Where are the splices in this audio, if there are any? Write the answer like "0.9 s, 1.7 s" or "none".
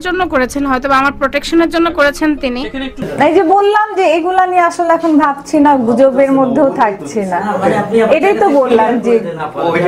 3.1 s